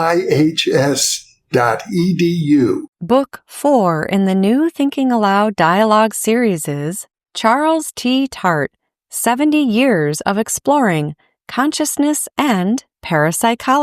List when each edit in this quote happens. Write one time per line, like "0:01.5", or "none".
0:02.9